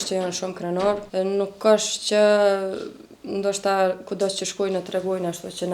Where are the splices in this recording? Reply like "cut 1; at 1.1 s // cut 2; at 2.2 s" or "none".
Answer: cut 1; at 1.0 s